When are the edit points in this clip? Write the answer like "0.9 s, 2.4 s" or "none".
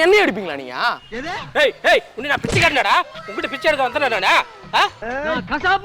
1.0 s, 5.0 s